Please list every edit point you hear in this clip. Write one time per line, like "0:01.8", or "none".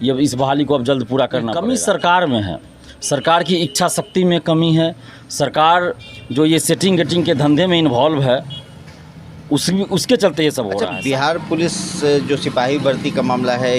0:01.5
0:10.8